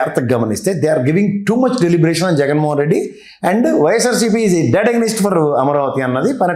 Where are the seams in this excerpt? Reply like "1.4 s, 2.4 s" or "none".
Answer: none